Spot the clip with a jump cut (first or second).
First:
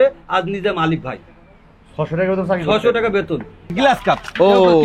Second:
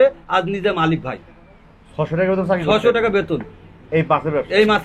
first